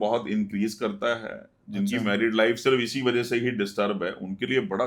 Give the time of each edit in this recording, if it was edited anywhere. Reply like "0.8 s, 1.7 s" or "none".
none